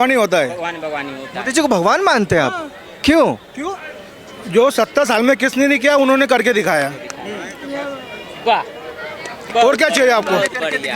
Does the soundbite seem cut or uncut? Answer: uncut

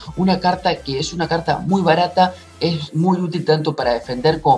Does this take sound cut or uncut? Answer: cut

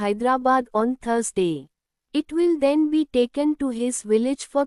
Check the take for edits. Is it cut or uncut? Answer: cut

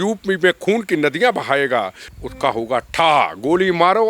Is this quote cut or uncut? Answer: cut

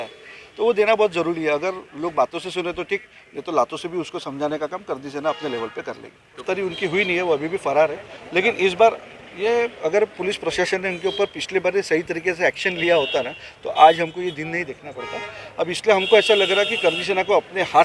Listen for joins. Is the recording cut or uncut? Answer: cut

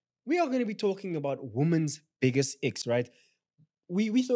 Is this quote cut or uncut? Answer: uncut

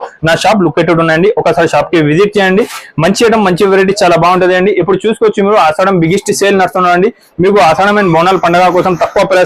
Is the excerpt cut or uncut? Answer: uncut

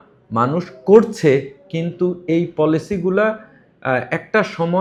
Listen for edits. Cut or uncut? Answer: uncut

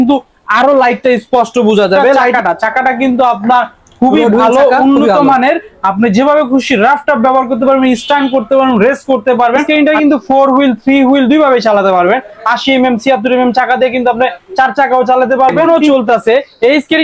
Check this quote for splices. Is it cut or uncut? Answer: cut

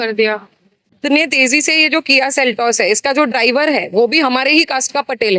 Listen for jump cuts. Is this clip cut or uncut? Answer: cut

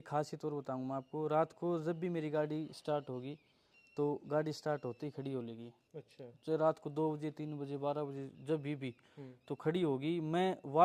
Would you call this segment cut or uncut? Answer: uncut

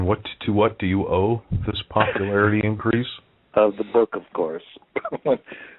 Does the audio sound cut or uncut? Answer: uncut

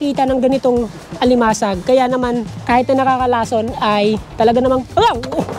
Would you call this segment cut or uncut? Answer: cut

